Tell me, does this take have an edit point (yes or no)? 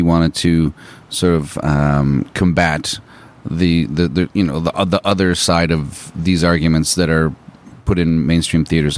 no